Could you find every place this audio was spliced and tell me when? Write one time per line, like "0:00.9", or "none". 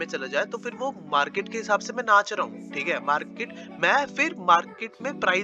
none